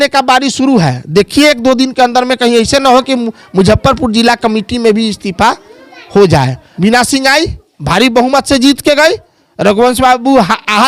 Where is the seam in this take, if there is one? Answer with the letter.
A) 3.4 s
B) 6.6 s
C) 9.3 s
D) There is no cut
B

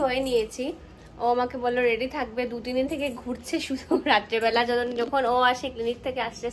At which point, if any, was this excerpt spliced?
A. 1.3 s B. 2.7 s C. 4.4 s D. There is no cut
D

